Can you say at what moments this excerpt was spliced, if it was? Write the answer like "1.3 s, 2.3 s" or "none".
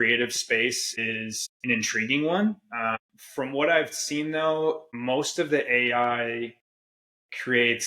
1.1 s, 2.9 s, 4.9 s